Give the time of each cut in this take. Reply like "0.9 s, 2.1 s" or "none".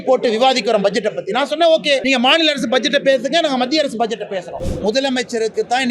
2.0 s, 4.6 s